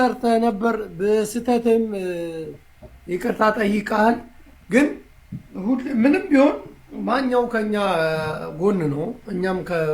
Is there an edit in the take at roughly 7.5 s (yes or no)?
no